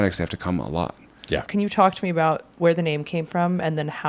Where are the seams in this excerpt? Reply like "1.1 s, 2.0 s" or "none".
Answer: none